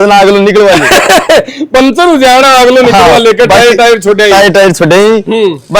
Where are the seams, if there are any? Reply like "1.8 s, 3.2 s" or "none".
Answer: none